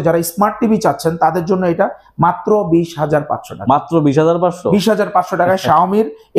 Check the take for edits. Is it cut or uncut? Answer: uncut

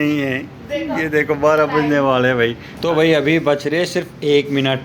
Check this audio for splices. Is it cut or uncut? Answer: cut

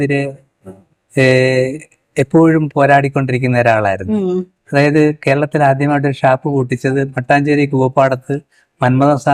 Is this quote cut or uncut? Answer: uncut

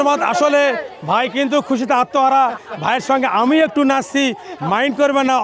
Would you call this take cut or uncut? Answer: uncut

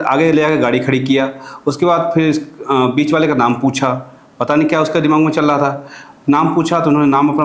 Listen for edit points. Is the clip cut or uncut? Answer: uncut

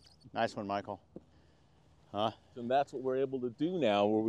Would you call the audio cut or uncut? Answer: cut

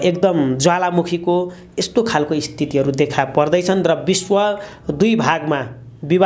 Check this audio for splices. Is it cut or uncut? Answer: uncut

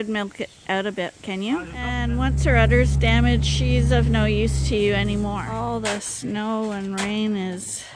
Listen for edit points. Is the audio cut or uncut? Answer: cut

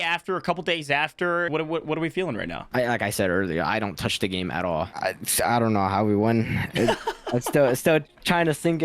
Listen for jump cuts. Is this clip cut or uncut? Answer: cut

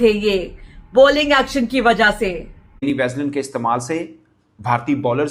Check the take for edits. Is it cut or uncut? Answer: cut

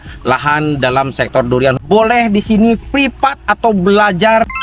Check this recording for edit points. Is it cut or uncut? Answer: cut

